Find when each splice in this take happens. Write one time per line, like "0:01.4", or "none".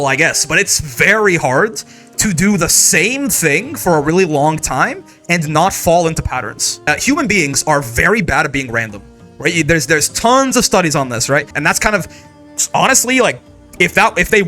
0:06.7
0:11.5